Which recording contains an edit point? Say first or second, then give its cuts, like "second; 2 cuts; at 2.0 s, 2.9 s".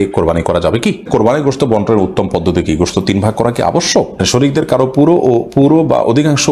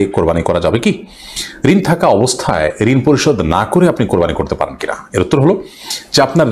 first; 2 cuts; at 1.1 s, 4.2 s